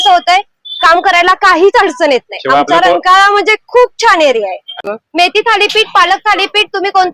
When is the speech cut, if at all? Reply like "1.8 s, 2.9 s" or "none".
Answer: 4.9 s